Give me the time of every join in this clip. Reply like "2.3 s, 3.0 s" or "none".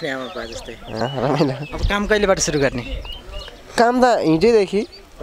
1.0 s